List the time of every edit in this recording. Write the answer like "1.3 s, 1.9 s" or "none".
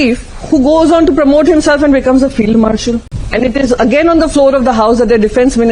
3.1 s